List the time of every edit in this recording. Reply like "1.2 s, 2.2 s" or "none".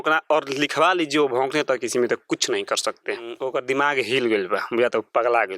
3.4 s